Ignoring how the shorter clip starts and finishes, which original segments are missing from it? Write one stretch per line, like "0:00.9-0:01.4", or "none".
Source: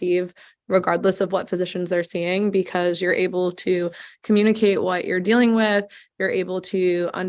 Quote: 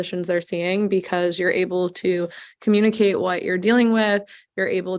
none